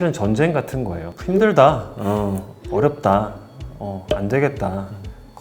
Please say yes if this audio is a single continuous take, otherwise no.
no